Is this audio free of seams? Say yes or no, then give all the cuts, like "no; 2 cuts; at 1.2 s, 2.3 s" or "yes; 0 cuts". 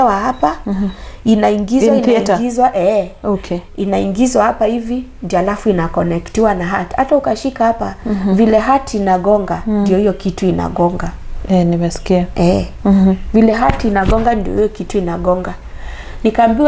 yes; 0 cuts